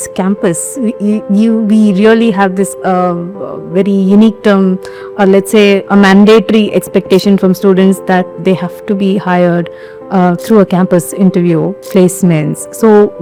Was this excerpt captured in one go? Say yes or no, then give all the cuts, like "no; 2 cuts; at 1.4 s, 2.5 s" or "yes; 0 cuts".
yes; 0 cuts